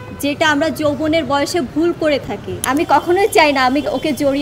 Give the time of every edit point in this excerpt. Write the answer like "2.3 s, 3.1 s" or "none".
2.5 s